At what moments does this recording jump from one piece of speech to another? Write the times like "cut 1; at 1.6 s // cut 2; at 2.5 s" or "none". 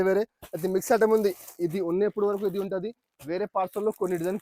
none

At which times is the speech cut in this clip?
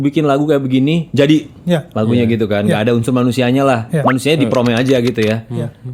none

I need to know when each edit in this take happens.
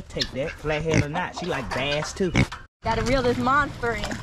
cut 1; at 2.7 s

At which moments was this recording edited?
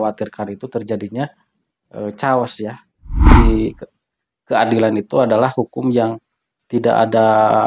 cut 1; at 3.3 s

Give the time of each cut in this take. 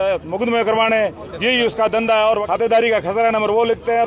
cut 1; at 2.4 s

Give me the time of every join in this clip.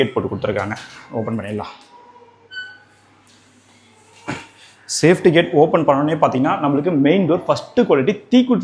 none

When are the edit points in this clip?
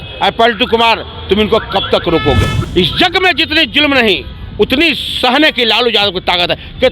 cut 1; at 2.6 s

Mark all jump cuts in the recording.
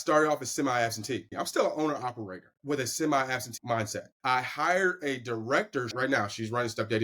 cut 1; at 1.3 s // cut 2; at 2.5 s // cut 3; at 3.6 s // cut 4; at 5.9 s

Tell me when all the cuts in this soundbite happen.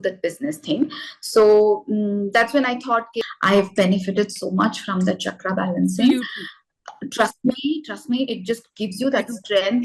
cut 1; at 3.2 s

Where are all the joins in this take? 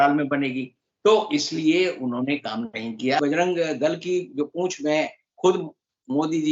cut 1; at 3.2 s

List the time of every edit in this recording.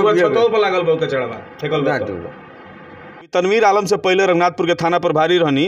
cut 1; at 3.3 s

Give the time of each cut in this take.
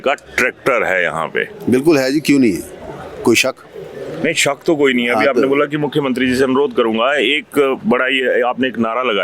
none

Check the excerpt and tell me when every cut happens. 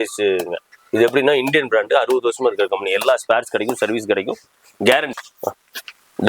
cut 1; at 5.1 s

